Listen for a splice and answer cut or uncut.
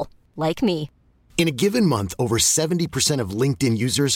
uncut